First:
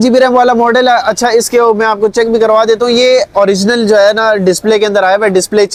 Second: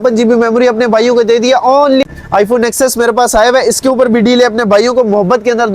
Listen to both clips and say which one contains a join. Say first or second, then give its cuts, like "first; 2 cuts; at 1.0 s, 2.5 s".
second; 1 cut; at 2.0 s